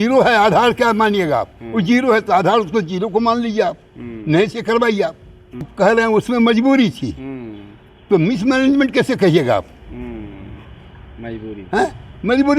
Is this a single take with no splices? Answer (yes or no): no